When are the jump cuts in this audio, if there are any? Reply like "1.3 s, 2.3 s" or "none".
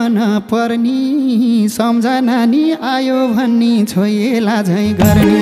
none